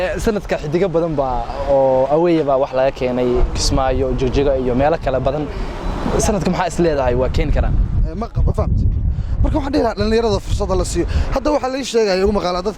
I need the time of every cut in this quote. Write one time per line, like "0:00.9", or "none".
0:08.2